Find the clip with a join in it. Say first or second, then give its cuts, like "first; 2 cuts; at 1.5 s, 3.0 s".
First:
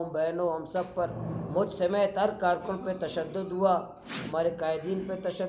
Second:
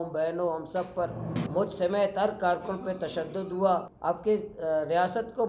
second; 1 cut; at 3.9 s